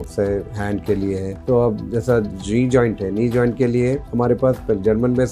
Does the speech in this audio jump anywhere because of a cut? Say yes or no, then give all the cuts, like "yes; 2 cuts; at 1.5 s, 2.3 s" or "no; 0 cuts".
no; 0 cuts